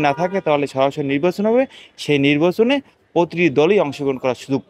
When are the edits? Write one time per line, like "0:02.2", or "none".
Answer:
none